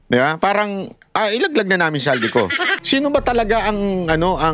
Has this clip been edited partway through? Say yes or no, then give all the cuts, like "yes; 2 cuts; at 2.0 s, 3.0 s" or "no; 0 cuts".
yes; 1 cut; at 2.8 s